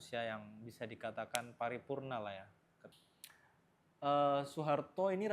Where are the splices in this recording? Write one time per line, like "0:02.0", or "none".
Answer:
0:02.8